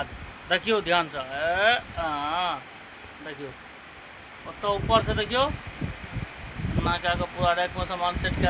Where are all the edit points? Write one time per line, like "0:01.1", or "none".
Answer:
none